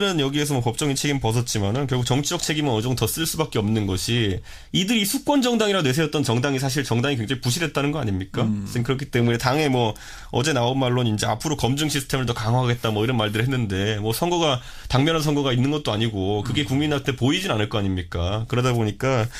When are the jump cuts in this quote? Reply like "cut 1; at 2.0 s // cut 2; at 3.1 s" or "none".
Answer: none